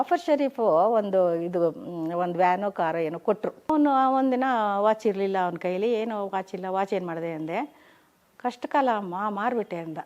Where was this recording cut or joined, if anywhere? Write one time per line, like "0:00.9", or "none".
0:03.7